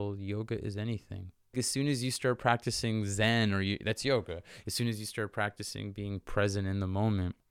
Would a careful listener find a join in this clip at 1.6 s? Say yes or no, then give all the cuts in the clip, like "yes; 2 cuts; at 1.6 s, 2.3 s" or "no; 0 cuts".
yes; 1 cut; at 1.6 s